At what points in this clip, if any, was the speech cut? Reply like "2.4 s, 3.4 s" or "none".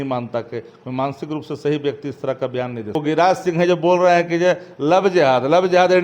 3.0 s